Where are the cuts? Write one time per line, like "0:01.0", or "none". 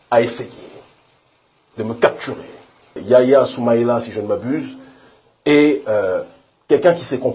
0:03.0